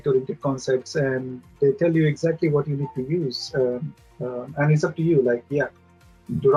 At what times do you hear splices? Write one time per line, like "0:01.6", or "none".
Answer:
none